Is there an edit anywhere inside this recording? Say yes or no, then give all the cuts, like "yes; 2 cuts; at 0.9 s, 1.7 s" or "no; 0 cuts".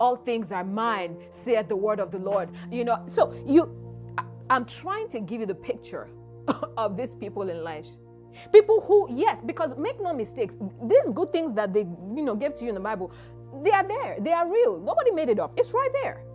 no; 0 cuts